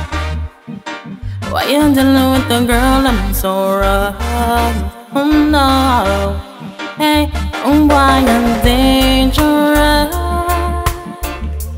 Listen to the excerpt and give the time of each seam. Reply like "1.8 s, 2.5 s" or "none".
none